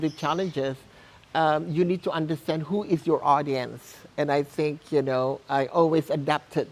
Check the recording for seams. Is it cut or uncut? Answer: uncut